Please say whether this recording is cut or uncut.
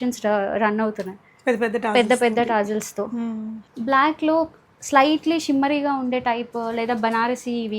cut